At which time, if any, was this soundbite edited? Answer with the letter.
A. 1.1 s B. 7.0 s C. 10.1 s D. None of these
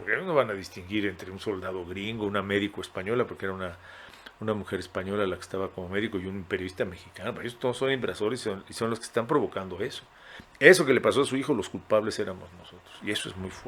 D